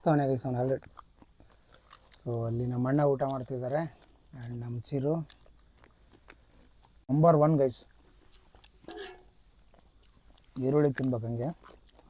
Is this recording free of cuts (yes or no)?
no